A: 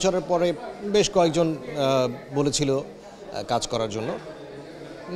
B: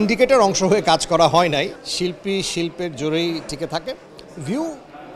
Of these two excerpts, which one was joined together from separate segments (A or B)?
B